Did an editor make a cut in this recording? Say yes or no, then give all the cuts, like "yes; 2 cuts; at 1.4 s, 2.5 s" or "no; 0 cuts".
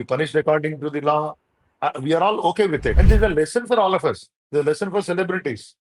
yes; 1 cut; at 3.0 s